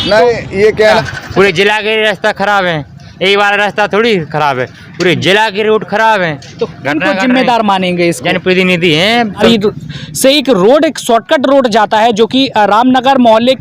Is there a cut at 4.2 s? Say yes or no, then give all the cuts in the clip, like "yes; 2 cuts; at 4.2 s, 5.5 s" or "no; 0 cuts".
no; 2 cuts; at 1.0 s, 9.4 s